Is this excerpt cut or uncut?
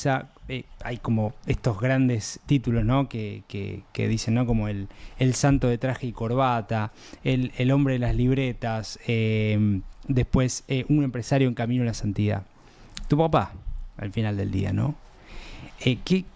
uncut